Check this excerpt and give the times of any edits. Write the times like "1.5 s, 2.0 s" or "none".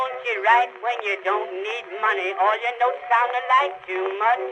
none